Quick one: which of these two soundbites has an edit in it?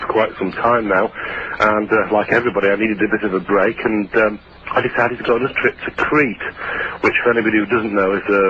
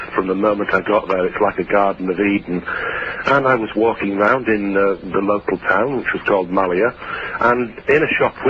first; 1 cut; at 7.2 s

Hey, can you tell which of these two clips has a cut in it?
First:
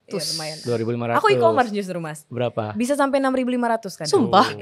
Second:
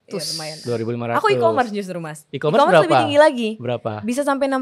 first; 1 cut; at 2.3 s

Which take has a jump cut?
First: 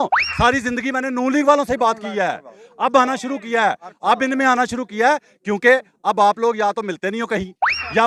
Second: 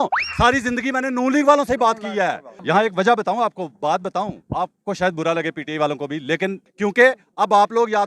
second; 2 cuts; at 2.5 s, 6.7 s

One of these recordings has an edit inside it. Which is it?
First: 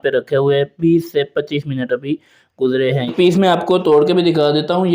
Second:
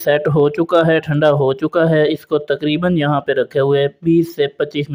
first; 1 cut; at 3.1 s

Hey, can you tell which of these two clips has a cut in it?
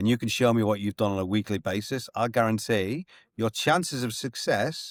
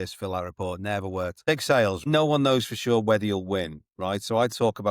second; 2 cuts; at 1.4 s, 2.0 s

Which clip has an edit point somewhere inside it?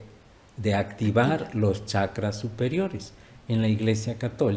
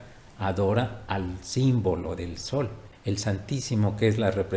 second; 1 cut; at 2.9 s

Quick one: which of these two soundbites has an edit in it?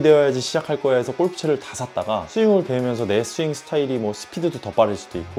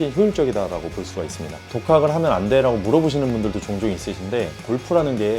second; 1 cut; at 1.6 s

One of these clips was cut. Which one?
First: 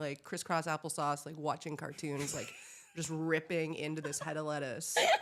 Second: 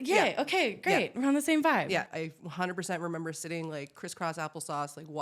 second; 1 cut; at 2.1 s

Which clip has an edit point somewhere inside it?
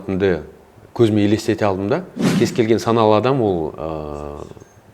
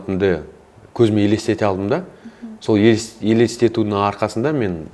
first; 1 cut; at 2.2 s

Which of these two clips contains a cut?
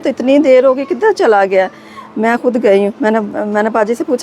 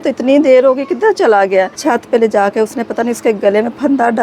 second; 1 cut; at 1.7 s

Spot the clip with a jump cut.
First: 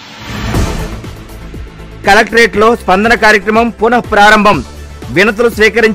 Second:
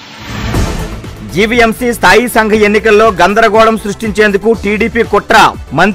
second; 1 cut; at 1.1 s

